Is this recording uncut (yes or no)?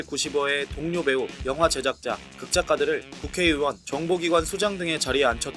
yes